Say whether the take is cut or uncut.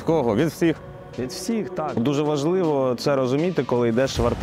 cut